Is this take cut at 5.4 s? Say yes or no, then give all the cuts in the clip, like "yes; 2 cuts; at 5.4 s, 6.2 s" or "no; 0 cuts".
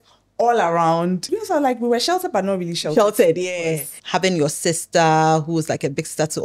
no; 2 cuts; at 1.2 s, 3.9 s